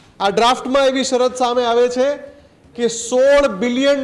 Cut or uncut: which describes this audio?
uncut